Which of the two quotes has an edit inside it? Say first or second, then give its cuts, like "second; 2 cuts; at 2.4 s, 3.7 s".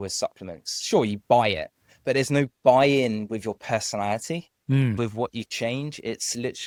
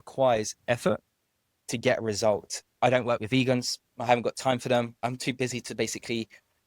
second; 2 cuts; at 2.6 s, 5.0 s